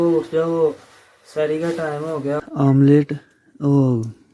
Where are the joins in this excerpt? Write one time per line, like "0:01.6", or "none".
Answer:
0:02.4